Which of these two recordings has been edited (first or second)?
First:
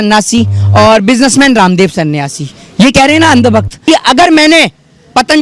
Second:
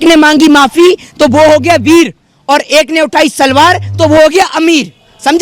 first